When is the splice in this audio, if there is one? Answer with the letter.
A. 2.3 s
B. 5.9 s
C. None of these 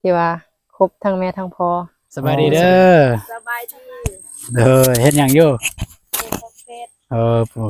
A